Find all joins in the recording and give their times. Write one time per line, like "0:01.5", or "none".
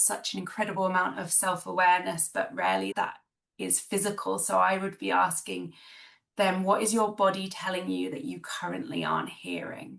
0:02.9